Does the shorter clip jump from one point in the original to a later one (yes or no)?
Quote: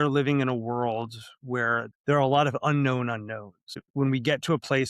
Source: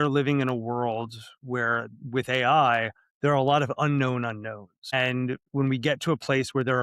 yes